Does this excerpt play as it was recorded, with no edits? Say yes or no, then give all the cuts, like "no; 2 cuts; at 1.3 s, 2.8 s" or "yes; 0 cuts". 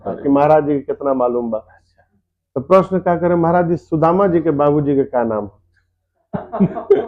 yes; 0 cuts